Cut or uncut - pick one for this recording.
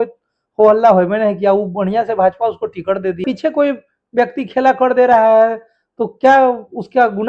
cut